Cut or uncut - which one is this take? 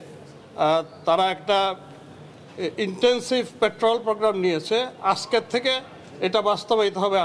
uncut